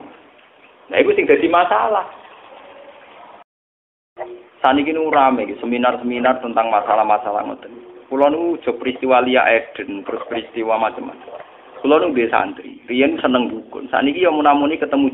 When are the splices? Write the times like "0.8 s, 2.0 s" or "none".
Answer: 4.0 s